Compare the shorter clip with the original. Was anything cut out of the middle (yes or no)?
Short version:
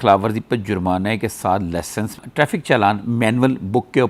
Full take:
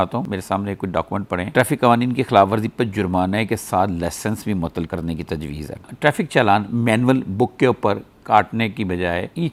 yes